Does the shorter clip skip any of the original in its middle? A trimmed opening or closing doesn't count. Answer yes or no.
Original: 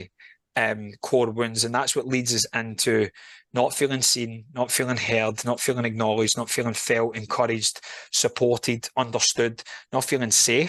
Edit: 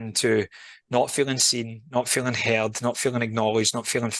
no